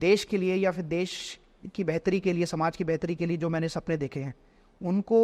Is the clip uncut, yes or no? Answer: yes